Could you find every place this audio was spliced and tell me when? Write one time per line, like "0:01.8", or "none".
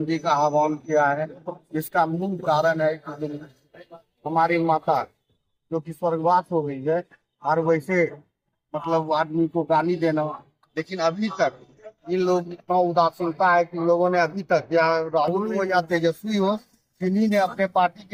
none